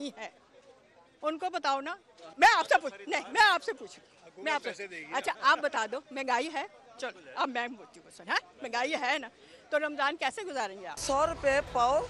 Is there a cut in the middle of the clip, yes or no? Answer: yes